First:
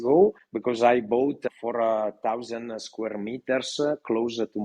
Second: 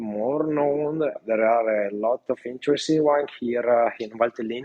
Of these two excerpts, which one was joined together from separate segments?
second; 1 cut; at 1.2 s

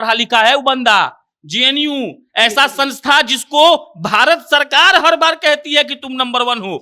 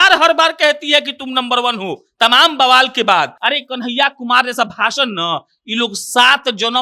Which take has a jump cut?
second; 1 cut; at 3.3 s

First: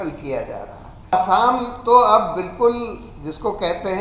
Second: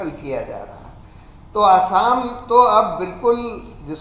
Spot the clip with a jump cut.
first; 1 cut; at 1.1 s

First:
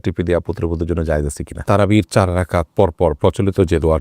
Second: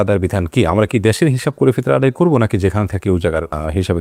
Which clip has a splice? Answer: first; 1 cut; at 1.6 s

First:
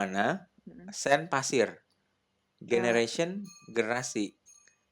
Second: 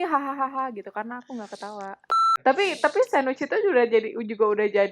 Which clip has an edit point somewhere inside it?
second; 1 cut; at 2.3 s

